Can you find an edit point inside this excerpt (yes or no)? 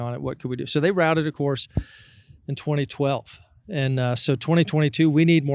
no